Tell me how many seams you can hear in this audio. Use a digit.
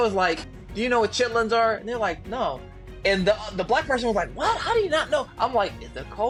0